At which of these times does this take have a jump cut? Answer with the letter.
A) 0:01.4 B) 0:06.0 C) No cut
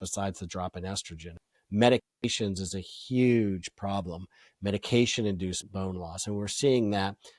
A